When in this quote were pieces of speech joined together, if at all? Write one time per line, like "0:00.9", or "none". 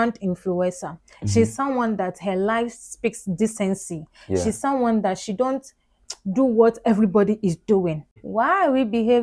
0:08.2